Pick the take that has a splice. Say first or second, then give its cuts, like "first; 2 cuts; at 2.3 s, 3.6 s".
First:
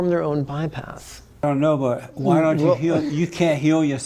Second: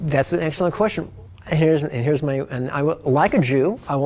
first; 1 cut; at 1.4 s